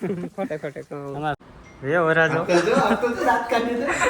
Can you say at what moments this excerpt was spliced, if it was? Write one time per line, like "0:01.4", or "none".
0:01.4